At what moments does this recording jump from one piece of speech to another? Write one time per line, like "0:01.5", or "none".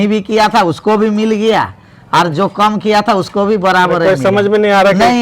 none

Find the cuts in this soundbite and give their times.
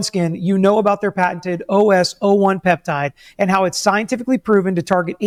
none

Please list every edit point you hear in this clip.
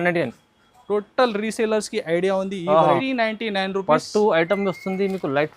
0:03.0

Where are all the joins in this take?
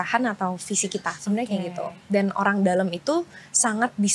0:01.1

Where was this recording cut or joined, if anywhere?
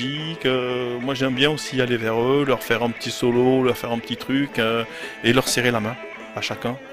none

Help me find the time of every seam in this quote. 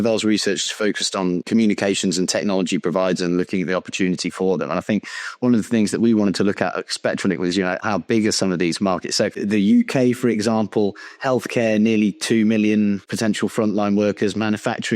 0:01.5
0:07.8
0:09.4
0:13.1

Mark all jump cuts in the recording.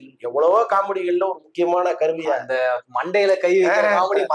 none

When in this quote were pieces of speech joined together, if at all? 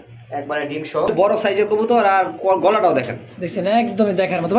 0:01.1

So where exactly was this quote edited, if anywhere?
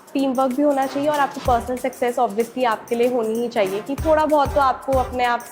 none

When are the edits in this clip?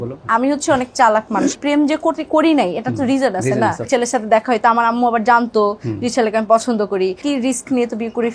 0:01.5
0:03.9
0:07.2

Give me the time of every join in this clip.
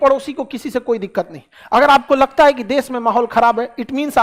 none

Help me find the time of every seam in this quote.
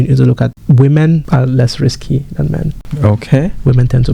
0:01.2
0:02.8

